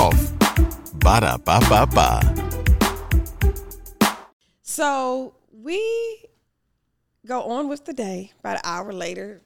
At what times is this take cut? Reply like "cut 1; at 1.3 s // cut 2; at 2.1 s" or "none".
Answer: cut 1; at 4.2 s